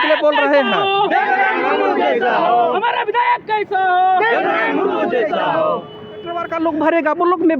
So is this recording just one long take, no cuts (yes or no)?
no